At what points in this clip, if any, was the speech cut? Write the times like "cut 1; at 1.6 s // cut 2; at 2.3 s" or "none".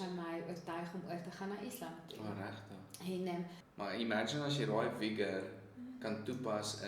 cut 1; at 3.6 s